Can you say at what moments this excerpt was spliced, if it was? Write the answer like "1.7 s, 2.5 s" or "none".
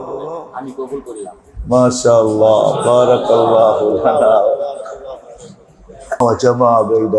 6.2 s